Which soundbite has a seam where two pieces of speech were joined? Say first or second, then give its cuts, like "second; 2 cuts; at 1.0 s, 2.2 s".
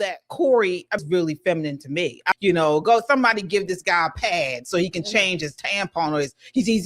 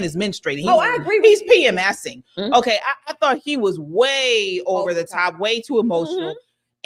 first; 2 cuts; at 1.0 s, 2.4 s